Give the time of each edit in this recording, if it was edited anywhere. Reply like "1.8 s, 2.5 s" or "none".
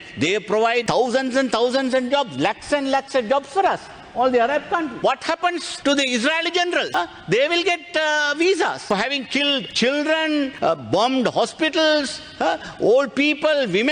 4.9 s